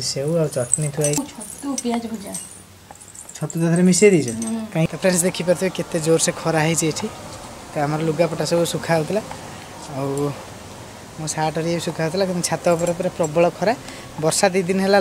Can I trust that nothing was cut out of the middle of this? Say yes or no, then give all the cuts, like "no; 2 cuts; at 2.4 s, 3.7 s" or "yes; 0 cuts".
no; 2 cuts; at 1.2 s, 4.9 s